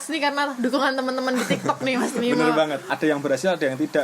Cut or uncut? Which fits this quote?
cut